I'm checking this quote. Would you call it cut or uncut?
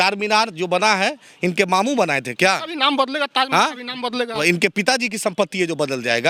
uncut